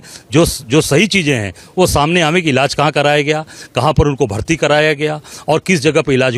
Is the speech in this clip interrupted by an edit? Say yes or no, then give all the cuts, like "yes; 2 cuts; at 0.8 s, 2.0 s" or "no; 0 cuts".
no; 0 cuts